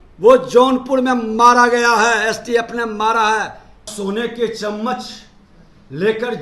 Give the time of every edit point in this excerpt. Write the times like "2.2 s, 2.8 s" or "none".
3.9 s